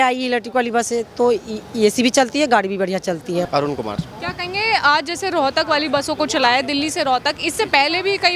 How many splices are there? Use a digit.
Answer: 1